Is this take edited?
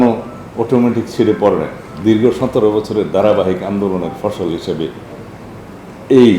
no; 0 cuts

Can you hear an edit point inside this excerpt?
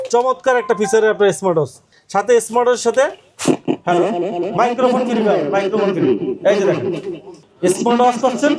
no; 0 cuts

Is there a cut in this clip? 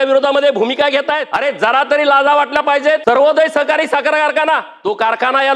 yes; 3 cuts; at 1.3 s, 3.0 s, 4.7 s

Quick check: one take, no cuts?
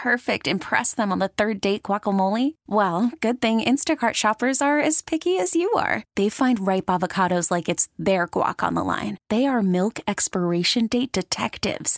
yes; 0 cuts

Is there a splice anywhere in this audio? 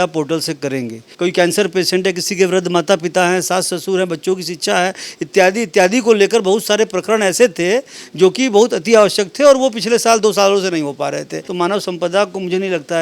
yes; 2 cuts; at 1.0 s, 11.4 s

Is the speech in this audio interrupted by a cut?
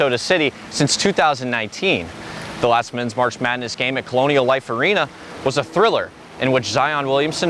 no; 0 cuts

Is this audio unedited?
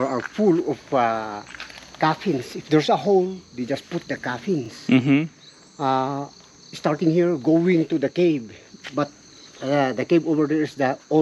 yes; 0 cuts

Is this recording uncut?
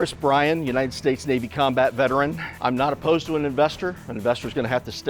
no; 1 cut; at 2.5 s

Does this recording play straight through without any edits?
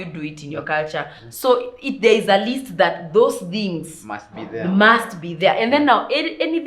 yes; 0 cuts

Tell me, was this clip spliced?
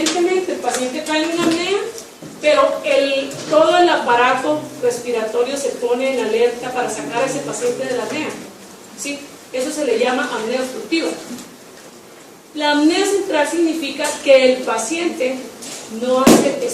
yes; 1 cut; at 9.6 s

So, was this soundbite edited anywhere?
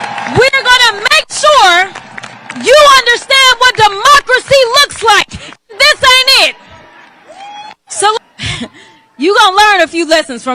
yes; 1 cut; at 8.2 s

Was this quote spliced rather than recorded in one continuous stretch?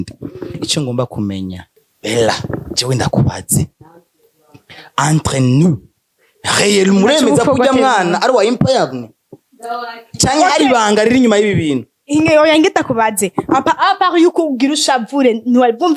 yes; 1 cut; at 1.8 s

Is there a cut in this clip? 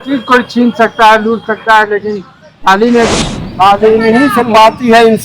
yes; 1 cut; at 3.1 s

